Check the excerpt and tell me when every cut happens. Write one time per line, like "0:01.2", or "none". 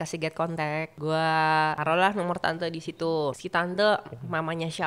0:00.9
0:01.8
0:03.3

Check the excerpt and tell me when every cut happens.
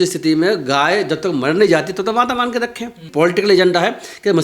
0:03.0

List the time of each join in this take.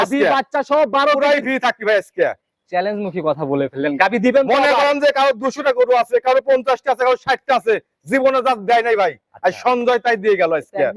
none

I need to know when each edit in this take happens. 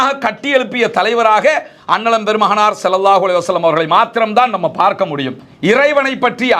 0:05.4

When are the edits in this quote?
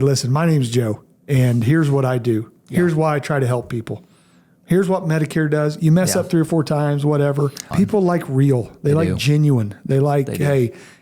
0:07.6

